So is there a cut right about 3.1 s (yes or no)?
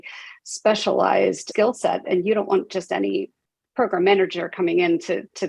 no